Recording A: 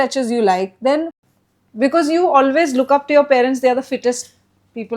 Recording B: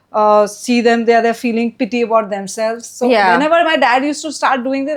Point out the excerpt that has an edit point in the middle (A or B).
A